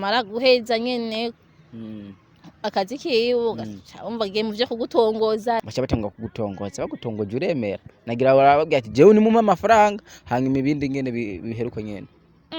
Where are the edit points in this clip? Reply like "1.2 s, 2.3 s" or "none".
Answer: 5.6 s